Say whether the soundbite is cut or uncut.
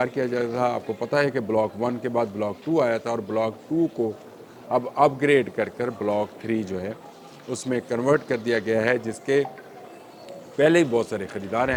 uncut